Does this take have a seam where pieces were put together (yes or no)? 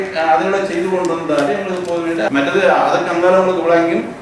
yes